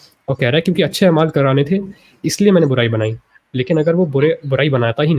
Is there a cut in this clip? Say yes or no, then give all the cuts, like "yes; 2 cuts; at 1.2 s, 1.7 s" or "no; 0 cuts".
no; 0 cuts